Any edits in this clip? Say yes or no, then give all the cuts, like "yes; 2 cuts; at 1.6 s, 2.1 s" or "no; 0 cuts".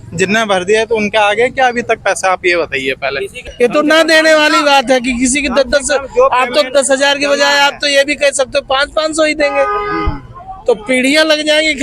yes; 1 cut; at 3.4 s